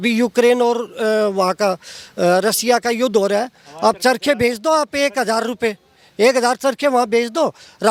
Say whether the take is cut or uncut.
uncut